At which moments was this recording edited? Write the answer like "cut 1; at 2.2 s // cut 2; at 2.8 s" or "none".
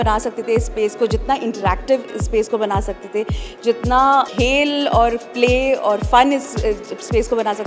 cut 1; at 4.3 s